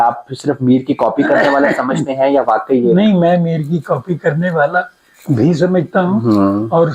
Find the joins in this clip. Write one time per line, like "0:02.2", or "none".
none